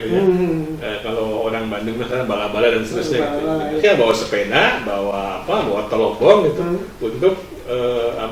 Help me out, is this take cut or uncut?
cut